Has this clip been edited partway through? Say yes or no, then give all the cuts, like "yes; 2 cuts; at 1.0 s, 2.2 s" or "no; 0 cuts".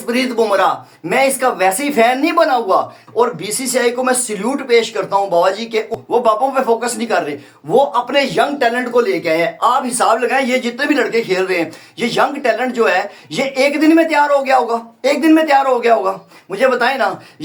yes; 2 cuts; at 3.0 s, 6.0 s